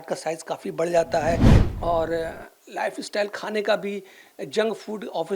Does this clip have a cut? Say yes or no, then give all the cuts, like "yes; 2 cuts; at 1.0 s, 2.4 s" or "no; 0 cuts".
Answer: yes; 1 cut; at 1.6 s